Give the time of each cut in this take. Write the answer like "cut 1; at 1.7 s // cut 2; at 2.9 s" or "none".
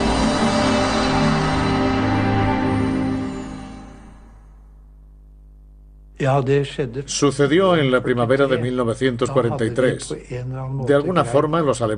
cut 1; at 5.4 s